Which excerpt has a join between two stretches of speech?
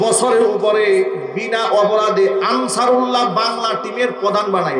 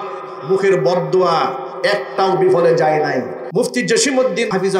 second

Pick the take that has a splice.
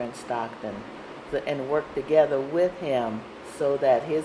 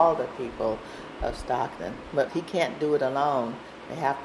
second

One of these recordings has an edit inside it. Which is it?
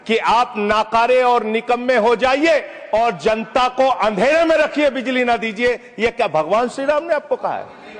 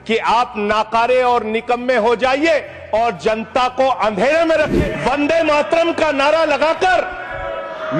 second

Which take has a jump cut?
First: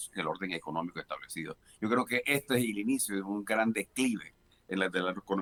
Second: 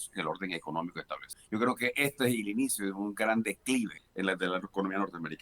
second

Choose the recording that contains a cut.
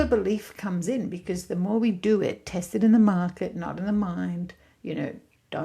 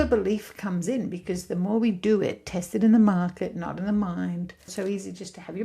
second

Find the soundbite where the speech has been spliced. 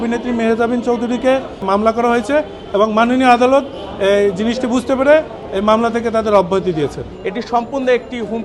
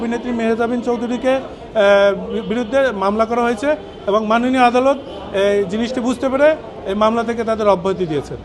first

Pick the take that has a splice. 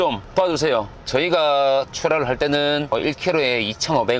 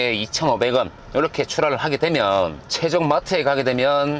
first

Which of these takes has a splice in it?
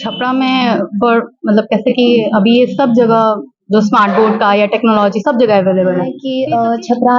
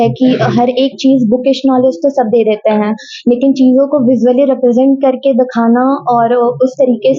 first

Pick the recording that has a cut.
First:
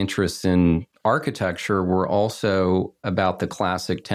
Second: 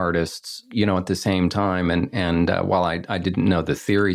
first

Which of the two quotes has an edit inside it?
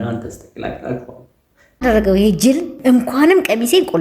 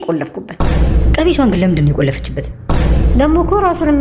first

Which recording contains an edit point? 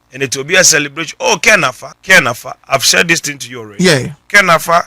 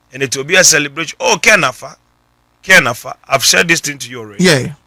first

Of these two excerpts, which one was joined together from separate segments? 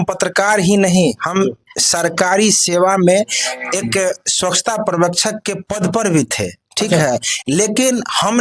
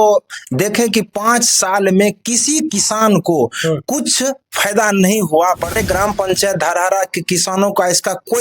second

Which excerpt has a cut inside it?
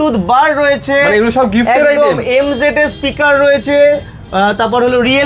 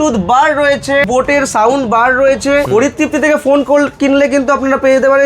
second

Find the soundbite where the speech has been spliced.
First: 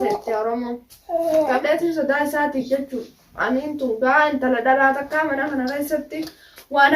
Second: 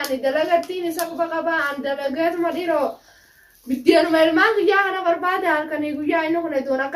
first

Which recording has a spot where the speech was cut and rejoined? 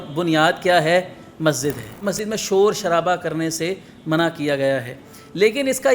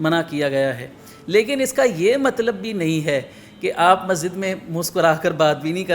first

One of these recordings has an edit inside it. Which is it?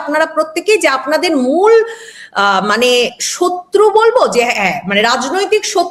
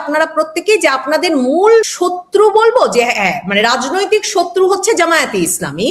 second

